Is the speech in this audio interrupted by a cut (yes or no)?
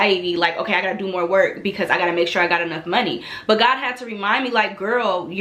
no